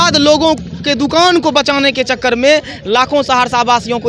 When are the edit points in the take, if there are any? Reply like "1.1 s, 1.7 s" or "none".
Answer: none